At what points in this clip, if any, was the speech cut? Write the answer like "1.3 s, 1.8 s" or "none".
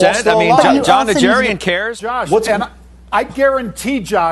1.9 s

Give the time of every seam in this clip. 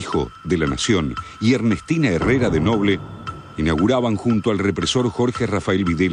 none

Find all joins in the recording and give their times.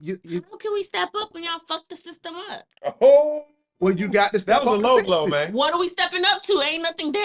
none

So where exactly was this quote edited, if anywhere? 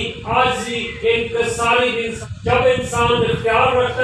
2.2 s

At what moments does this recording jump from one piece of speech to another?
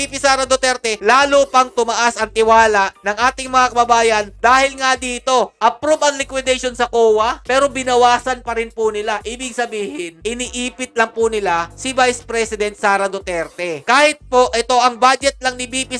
none

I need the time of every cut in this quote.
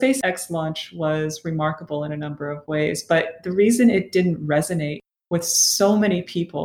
none

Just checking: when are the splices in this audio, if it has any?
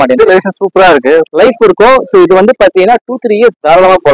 none

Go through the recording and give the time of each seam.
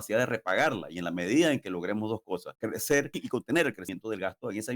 2.5 s, 3.2 s, 3.9 s

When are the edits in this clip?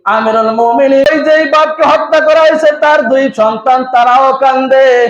1.1 s

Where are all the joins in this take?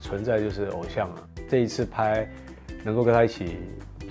1.3 s

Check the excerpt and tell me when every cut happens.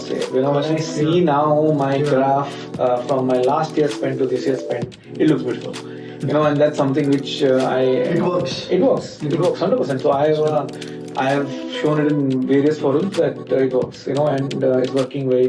none

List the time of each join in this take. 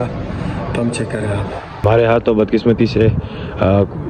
1.6 s

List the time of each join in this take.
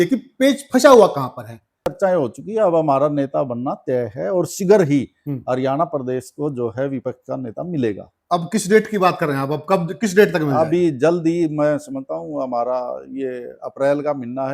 1.8 s

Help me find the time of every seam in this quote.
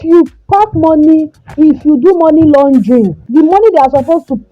3.2 s

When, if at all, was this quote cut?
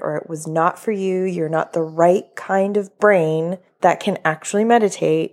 3.6 s

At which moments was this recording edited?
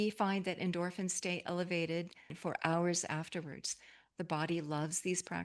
2.3 s

